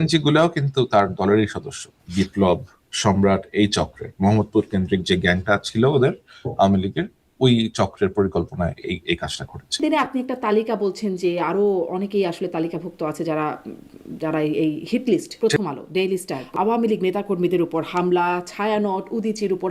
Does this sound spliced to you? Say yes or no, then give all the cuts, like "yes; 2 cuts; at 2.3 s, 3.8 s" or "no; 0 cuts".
yes; 4 cuts; at 2.0 s, 9.8 s, 15.3 s, 16.4 s